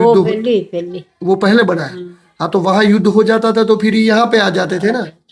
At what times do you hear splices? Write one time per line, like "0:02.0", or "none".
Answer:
none